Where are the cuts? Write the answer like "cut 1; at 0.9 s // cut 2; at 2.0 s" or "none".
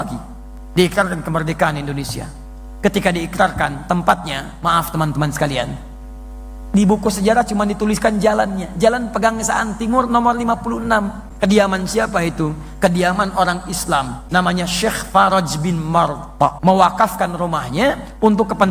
cut 1; at 11.2 s // cut 2; at 14.2 s // cut 3; at 16.6 s